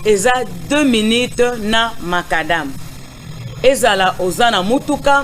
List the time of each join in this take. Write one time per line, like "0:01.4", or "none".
0:04.3